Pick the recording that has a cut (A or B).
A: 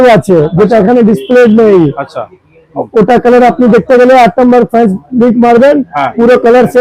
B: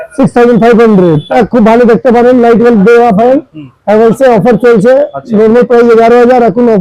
B